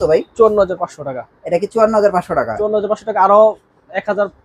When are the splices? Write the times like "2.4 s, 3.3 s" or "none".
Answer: none